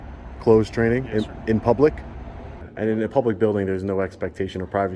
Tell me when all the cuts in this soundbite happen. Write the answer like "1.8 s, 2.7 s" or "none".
2.7 s